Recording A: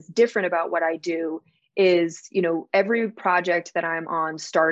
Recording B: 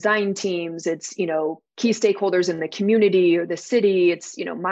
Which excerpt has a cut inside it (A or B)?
B